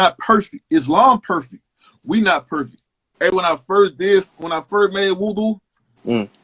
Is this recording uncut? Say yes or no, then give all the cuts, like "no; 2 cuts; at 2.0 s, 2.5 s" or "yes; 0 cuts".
no; 1 cut; at 2.7 s